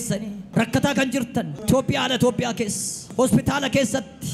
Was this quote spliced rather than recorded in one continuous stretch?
no; 0 cuts

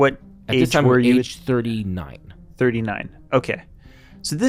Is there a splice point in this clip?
no; 0 cuts

